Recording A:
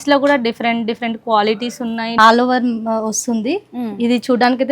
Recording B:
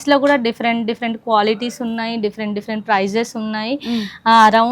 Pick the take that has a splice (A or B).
A